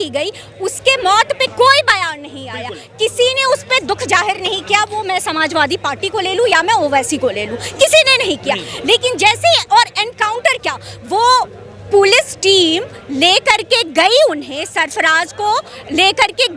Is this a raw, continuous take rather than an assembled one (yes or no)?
yes